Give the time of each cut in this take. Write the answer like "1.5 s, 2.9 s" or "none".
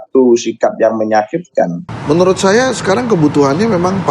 1.8 s